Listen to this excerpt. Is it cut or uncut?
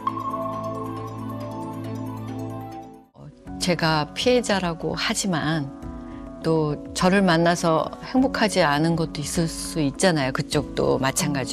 cut